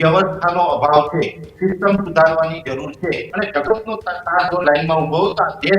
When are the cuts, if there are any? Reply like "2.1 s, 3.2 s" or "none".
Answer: 3.3 s